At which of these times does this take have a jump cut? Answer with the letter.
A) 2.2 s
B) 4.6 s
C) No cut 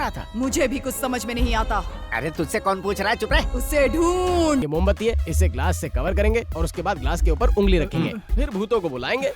B